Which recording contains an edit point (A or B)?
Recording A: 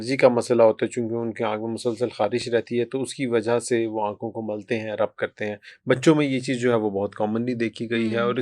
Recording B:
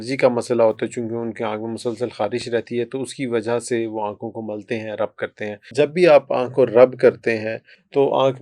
B